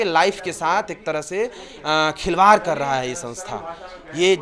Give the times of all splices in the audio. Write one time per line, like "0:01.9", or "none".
none